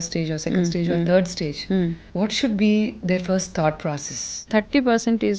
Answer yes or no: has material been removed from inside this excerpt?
yes